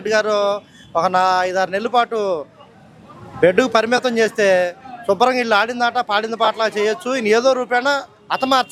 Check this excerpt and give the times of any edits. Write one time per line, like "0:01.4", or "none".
none